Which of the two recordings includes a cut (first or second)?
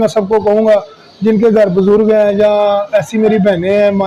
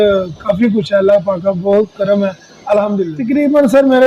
second